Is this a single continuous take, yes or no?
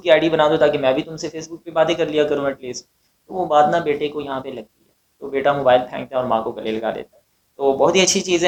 yes